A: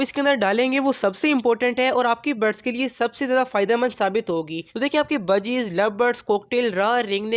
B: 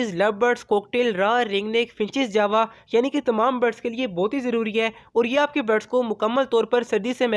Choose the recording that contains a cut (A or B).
A